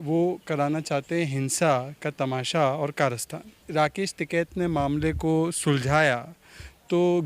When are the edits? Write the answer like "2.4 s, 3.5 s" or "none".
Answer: 3.6 s